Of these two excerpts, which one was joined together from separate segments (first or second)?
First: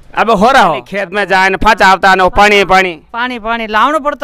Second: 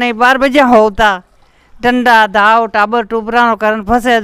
first